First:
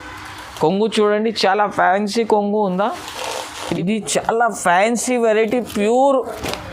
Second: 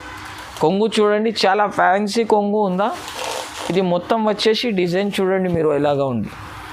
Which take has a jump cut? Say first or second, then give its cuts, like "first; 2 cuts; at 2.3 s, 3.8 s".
first; 1 cut; at 3.5 s